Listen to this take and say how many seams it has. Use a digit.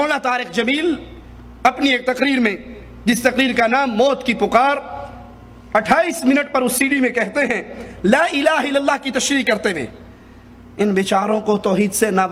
0